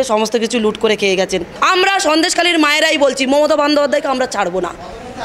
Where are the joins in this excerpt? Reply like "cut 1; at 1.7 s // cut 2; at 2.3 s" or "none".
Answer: cut 1; at 1.5 s